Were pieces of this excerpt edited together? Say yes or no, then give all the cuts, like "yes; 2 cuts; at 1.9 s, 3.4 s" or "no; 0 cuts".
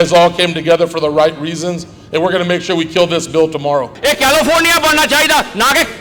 yes; 1 cut; at 3.9 s